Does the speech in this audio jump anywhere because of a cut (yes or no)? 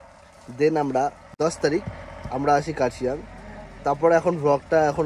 yes